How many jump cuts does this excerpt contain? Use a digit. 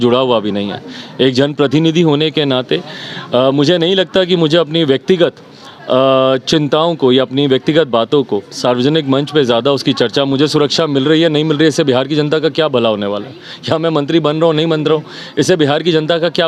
0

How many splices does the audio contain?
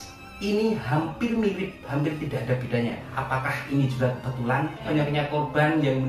2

